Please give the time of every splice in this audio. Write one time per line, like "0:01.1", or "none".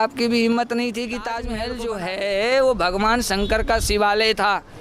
0:01.5